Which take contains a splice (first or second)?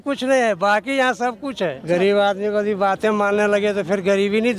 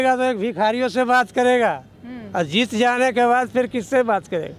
first